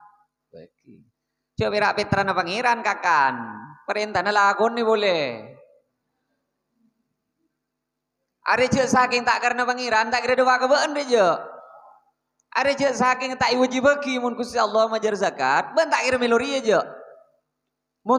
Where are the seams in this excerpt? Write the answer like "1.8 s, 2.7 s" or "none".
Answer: none

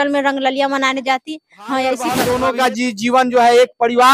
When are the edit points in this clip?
2.2 s

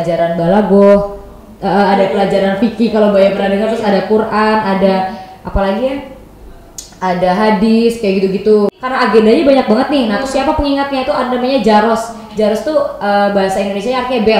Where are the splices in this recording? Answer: 8.8 s

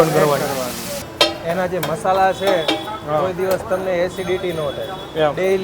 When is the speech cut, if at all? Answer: 1.1 s

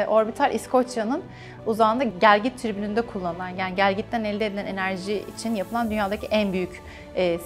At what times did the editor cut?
none

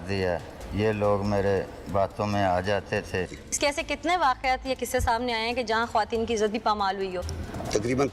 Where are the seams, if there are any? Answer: 3.3 s

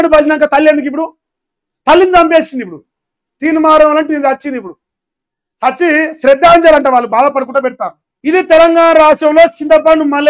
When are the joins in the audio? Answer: 8.0 s

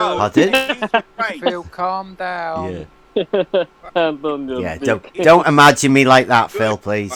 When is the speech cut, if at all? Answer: none

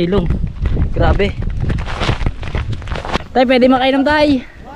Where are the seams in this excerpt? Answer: 3.2 s

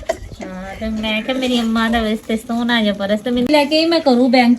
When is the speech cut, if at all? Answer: 3.5 s

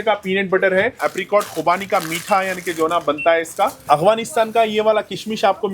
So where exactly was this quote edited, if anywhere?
1.0 s, 3.8 s

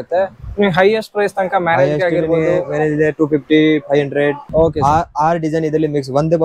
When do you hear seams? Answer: 4.4 s

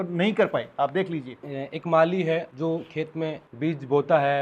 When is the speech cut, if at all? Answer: 1.4 s, 2.5 s, 3.5 s

